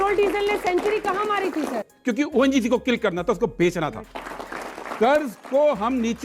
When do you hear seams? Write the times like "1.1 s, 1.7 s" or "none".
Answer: 1.8 s, 4.3 s